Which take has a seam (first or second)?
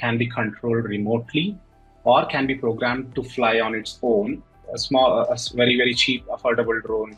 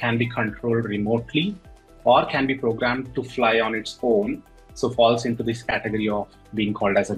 first